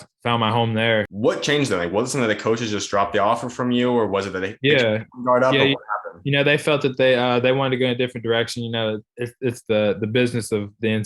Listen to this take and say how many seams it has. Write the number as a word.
one